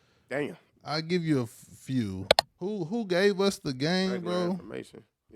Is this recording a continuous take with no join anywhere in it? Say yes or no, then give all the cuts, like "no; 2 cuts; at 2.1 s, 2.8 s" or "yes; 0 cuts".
no; 1 cut; at 2.4 s